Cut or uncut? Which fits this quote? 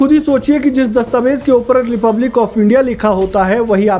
uncut